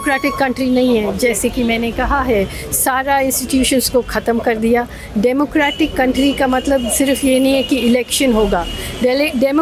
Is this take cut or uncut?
uncut